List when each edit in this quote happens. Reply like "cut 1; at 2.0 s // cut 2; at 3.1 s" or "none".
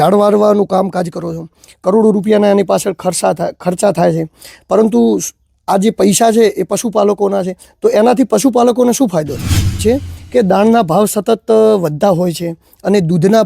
cut 1; at 9.8 s